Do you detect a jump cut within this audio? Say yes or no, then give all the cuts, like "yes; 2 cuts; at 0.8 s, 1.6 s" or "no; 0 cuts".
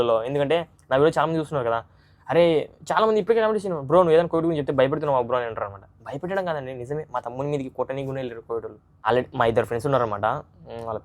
yes; 1 cut; at 8.8 s